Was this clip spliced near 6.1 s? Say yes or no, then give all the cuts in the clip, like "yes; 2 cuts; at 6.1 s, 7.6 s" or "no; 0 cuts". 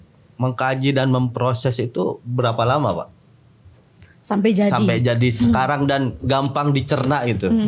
no; 0 cuts